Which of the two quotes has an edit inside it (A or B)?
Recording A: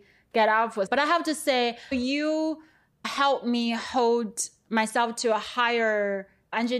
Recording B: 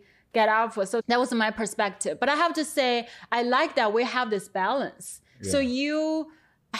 A